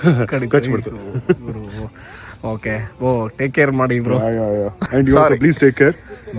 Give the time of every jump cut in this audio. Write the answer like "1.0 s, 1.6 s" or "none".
4.8 s